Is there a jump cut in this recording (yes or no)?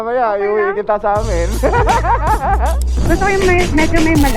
yes